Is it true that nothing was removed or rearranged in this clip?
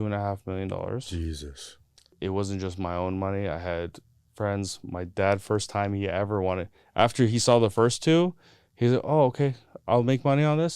no; 1 cut; at 2.1 s

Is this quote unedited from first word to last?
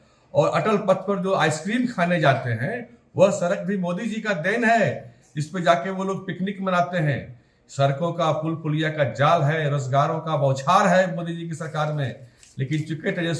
yes; 0 cuts

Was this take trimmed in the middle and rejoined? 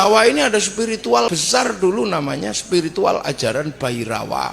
yes; 1 cut; at 1.4 s

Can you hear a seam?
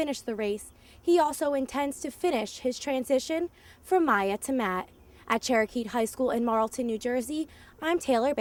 no; 0 cuts

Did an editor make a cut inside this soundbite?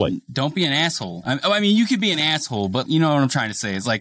yes; 1 cut; at 1.1 s

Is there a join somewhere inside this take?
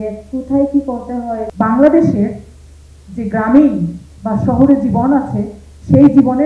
yes; 1 cut; at 1.5 s

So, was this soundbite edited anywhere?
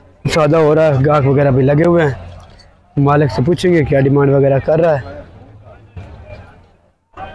no; 0 cuts

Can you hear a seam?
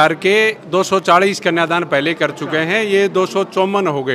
no; 0 cuts

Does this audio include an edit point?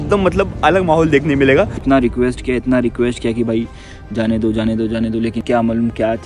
yes; 2 cuts; at 1.8 s, 5.4 s

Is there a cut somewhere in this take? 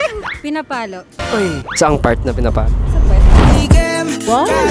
no; 0 cuts

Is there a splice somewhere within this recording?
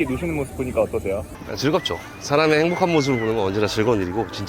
no; 0 cuts

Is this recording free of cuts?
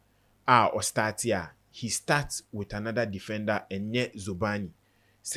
yes; 0 cuts

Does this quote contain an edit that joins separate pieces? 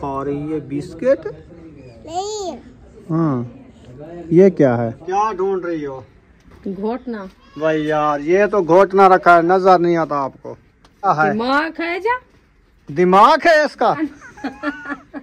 yes; 4 cuts; at 5.0 s, 7.4 s, 11.1 s, 14.0 s

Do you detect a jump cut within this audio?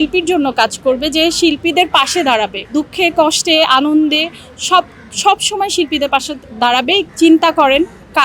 yes; 2 cuts; at 2.6 s, 7.1 s

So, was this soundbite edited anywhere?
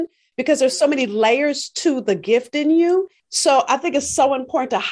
yes; 1 cut; at 3.2 s

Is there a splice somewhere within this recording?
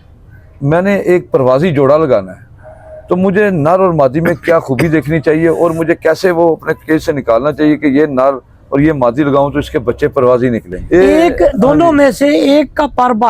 yes; 1 cut; at 10.7 s

